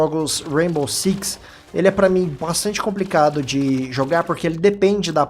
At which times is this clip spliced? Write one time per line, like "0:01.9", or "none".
0:02.4